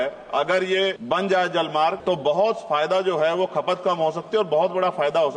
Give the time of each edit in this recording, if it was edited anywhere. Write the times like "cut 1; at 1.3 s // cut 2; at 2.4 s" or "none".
cut 1; at 1.0 s // cut 2; at 2.0 s